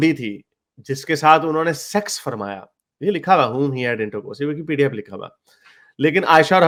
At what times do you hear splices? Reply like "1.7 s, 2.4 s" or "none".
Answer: none